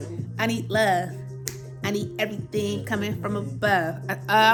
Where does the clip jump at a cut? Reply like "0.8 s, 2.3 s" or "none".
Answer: none